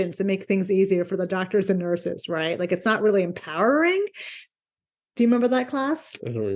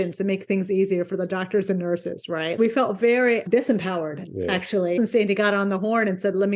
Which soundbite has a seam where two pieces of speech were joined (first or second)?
second